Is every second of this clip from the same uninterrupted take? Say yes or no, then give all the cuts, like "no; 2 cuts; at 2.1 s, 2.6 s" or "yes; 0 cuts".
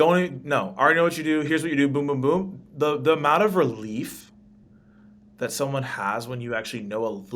yes; 0 cuts